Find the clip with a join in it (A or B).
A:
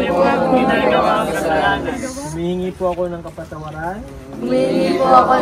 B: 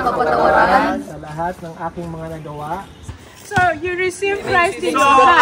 B